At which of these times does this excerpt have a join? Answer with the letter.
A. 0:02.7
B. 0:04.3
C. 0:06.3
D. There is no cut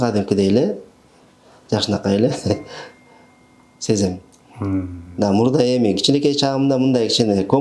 D